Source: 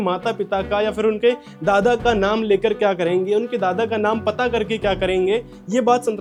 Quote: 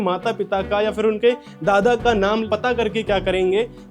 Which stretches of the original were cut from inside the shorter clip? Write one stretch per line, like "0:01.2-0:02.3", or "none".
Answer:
0:02.5-0:04.2

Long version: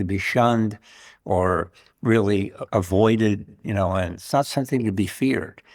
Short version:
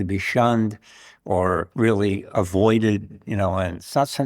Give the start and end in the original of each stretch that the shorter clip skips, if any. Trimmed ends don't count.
0:02.1-0:02.4

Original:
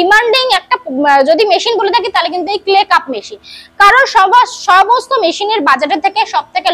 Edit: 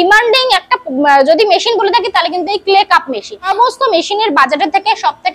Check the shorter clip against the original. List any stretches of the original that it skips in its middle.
0:03.5-0:04.8

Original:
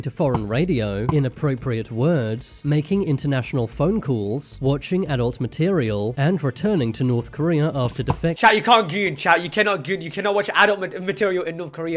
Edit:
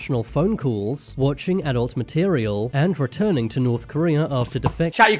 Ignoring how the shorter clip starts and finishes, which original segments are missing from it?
none

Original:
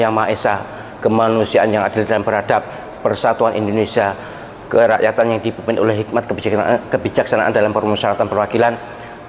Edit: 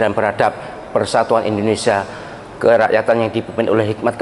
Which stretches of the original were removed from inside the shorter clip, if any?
none

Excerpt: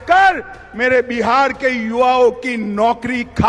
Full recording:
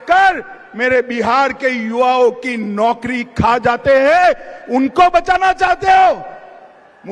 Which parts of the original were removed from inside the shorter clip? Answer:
none

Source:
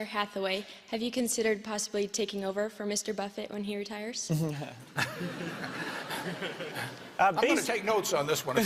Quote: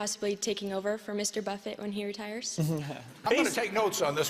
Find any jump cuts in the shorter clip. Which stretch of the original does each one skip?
0:04.9-0:07.3

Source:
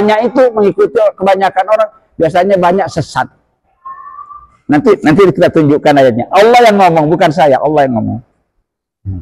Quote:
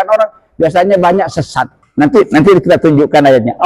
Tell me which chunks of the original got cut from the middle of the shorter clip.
0:03.4-0:04.5

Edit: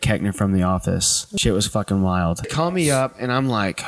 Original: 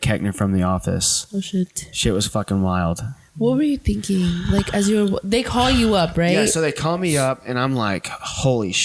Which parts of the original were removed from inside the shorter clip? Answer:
0:01.2-0:01.8
0:03.1-0:06.8

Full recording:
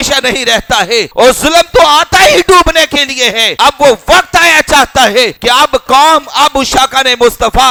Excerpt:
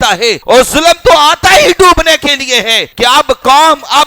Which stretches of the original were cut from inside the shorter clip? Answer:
0:03.6-0:05.3

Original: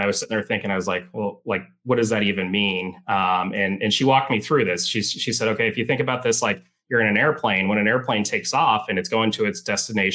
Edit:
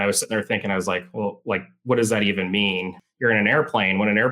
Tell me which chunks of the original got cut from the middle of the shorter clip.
0:03.0-0:06.7

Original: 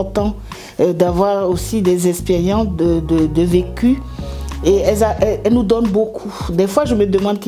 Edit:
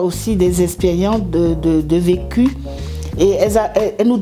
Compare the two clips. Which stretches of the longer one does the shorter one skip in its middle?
none

